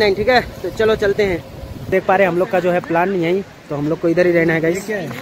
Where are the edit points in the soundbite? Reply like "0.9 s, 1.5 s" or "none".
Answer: 1.9 s